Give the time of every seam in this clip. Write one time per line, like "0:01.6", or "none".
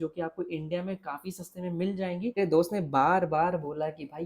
0:02.3